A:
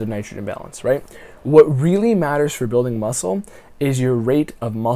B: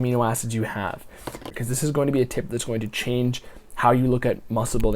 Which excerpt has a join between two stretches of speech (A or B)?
B